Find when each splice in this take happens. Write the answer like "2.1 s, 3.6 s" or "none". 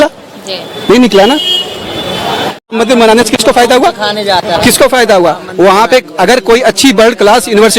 2.5 s